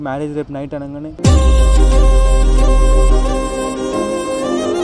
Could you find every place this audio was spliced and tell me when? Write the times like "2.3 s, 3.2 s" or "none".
1.0 s